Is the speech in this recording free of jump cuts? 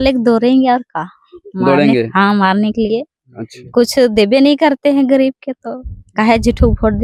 yes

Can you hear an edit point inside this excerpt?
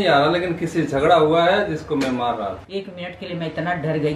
yes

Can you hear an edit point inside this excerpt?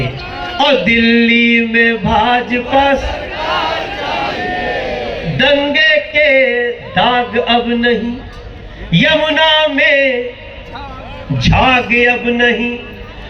no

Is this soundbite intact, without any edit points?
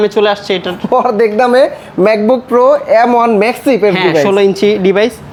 yes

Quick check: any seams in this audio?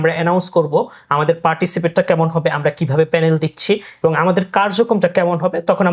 no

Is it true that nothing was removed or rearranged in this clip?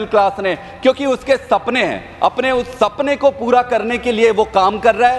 yes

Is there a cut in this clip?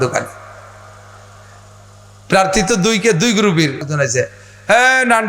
yes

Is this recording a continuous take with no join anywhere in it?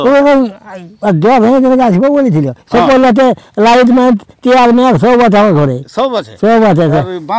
yes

